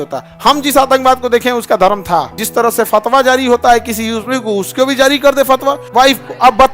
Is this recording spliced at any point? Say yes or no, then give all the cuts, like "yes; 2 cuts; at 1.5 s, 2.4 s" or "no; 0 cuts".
yes; 2 cuts; at 2.4 s, 5.8 s